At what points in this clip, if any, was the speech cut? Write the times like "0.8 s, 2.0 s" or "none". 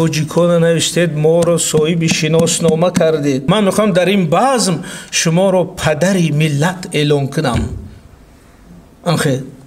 3.4 s